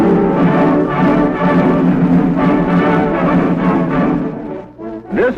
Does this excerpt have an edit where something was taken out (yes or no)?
no